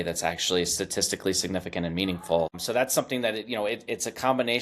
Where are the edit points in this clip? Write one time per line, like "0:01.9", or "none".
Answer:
0:02.6

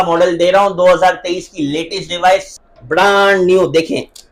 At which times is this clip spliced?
0:02.5

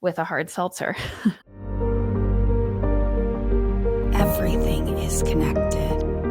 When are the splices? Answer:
0:01.5

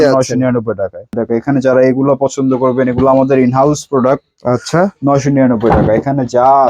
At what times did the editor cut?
0:01.1

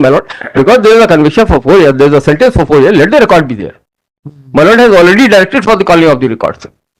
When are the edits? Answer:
none

